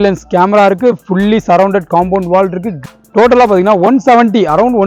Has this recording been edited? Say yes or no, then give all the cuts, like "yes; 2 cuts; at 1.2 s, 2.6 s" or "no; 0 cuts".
yes; 1 cut; at 2.8 s